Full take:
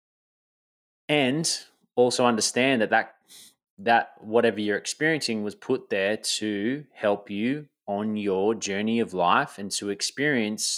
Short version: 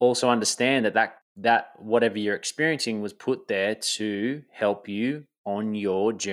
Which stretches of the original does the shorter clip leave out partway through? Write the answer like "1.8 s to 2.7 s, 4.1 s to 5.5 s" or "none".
3.2 s to 3.7 s